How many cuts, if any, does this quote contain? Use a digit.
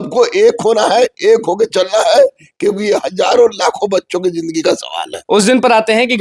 0